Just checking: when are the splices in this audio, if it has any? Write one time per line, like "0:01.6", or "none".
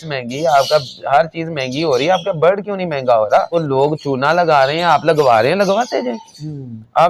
0:03.5